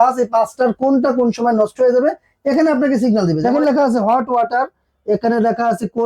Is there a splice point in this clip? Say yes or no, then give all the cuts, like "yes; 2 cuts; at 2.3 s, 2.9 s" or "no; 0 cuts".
yes; 1 cut; at 3.4 s